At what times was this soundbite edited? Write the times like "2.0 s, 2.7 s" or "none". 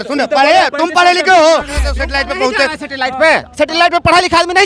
2.0 s